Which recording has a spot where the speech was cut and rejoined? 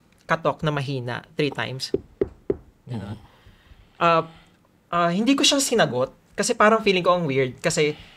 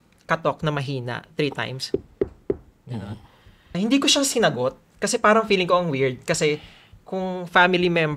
second; 1 cut; at 3.8 s

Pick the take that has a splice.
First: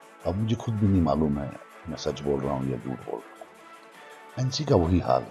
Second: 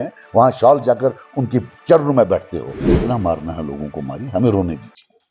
second; 1 cut; at 2.8 s

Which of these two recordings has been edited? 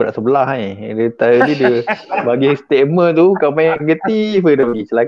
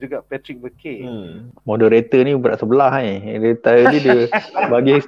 second; 1 cut; at 1.5 s

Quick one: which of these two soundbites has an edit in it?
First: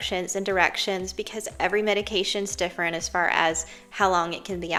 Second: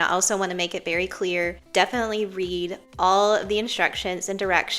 second; 2 cuts; at 1.6 s, 2.8 s

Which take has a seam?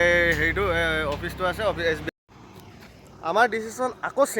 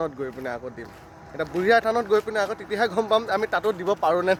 first; 1 cut; at 2.0 s

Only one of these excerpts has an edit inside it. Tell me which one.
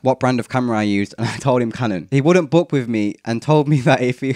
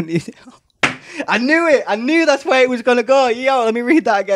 first; 1 cut; at 2.0 s

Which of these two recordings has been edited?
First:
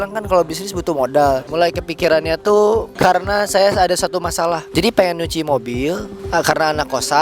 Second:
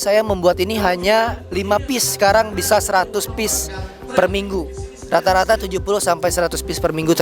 first; 4 cuts; at 1.5 s, 2.9 s, 4.6 s, 6.1 s

